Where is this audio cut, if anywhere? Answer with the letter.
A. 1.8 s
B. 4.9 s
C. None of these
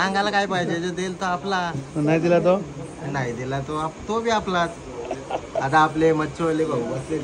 C